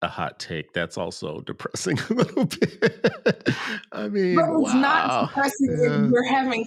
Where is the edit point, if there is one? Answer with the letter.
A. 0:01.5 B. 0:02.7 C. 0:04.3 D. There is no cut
D